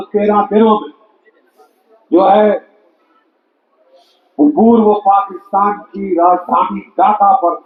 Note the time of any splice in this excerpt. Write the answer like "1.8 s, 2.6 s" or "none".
none